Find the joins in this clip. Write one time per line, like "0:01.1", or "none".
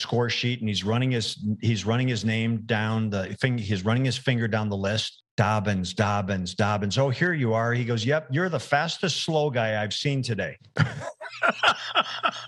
0:05.1